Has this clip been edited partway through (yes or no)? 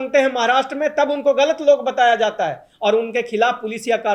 no